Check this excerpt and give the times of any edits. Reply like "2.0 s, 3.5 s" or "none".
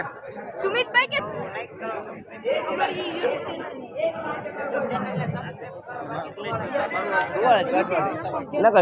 1.3 s